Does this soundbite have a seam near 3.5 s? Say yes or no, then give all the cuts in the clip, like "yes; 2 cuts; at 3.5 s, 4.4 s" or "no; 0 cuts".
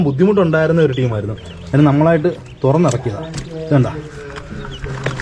no; 0 cuts